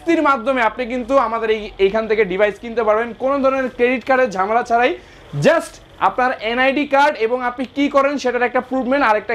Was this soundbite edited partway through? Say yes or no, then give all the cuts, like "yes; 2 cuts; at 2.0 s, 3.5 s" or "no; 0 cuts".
no; 0 cuts